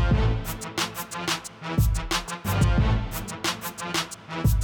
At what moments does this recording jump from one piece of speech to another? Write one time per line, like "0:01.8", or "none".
0:03.2